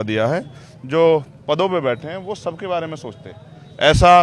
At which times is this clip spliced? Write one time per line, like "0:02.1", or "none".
none